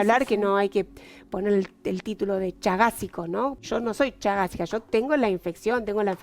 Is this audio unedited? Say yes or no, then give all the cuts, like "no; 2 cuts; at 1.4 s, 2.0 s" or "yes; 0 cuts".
no; 1 cut; at 3.6 s